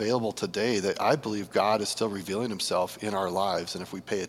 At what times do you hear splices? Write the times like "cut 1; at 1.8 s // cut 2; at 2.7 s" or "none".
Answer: none

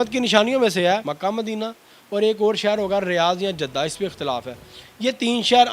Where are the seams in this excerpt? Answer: cut 1; at 1.1 s

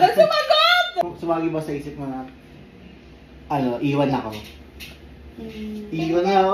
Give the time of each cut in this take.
cut 1; at 1.0 s

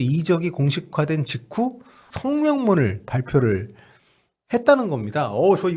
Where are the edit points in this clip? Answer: cut 1; at 2.1 s

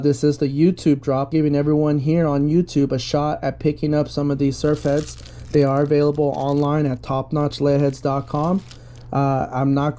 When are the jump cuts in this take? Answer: cut 1; at 1.3 s

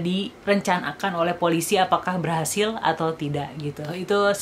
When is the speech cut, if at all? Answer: none

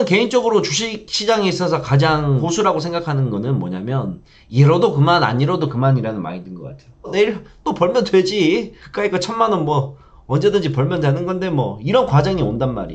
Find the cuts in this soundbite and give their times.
cut 1; at 7.0 s

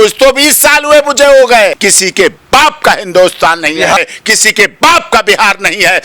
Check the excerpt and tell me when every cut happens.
cut 1; at 1.8 s // cut 2; at 4.0 s

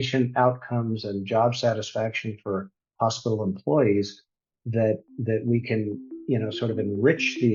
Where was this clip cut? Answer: none

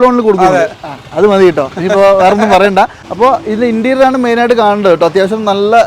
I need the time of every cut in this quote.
cut 1; at 3.0 s

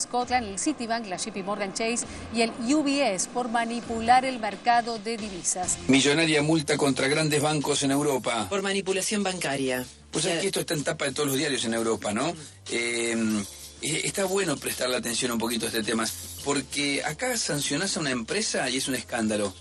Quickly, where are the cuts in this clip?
cut 1; at 5.7 s

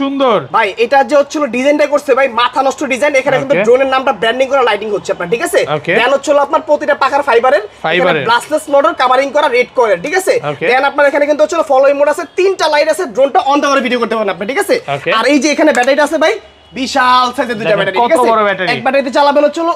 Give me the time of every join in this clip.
none

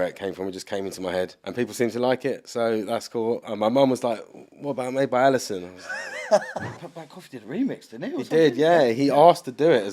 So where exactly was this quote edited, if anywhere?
cut 1; at 1.4 s // cut 2; at 6.7 s

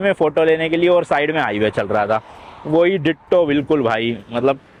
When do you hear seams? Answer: none

